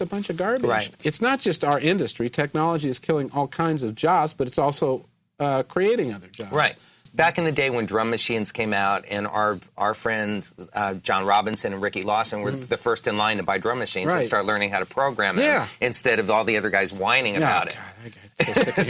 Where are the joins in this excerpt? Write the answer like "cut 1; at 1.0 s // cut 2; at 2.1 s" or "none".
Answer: cut 1; at 1.0 s // cut 2; at 7.0 s